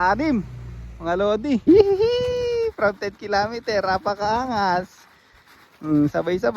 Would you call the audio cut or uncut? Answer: cut